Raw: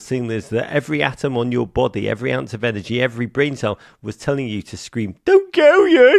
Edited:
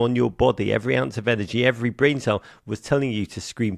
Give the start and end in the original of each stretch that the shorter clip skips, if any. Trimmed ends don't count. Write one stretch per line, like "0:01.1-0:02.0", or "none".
none